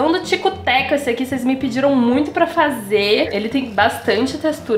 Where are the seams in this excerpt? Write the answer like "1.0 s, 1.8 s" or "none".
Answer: 3.3 s